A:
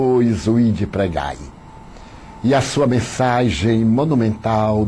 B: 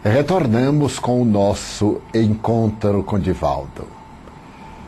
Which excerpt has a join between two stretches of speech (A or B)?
A